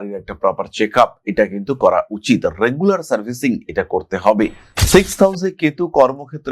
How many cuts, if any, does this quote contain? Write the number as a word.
one